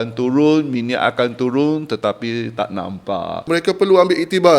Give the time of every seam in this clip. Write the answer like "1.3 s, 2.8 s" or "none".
3.5 s

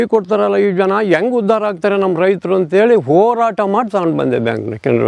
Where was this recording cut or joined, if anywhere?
none

